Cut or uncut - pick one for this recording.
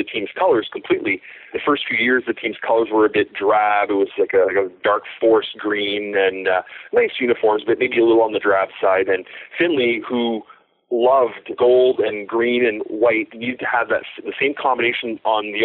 cut